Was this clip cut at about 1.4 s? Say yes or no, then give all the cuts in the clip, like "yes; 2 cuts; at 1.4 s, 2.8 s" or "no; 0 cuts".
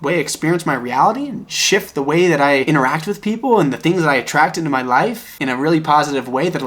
no; 2 cuts; at 2.6 s, 5.3 s